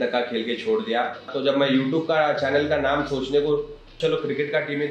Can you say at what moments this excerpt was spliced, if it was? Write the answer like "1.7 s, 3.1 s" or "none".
1.3 s, 3.9 s